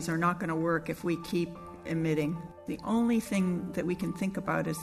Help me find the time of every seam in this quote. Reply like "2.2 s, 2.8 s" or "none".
2.6 s